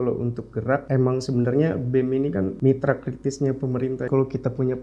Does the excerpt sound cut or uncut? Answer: cut